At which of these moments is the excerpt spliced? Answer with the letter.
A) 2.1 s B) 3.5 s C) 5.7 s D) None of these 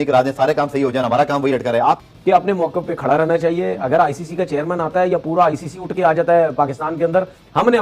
A